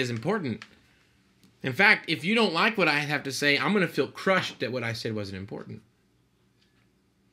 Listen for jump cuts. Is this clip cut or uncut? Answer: uncut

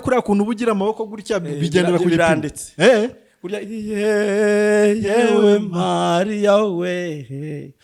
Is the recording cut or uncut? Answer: uncut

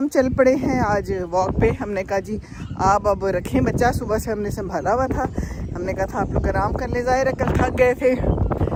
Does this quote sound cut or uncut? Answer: uncut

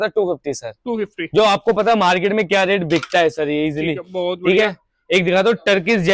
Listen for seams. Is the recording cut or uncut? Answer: uncut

